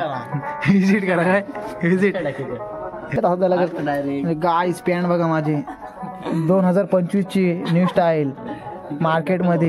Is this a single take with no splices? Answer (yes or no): no